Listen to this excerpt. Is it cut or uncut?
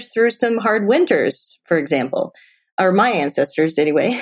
uncut